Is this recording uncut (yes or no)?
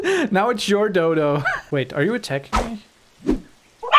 no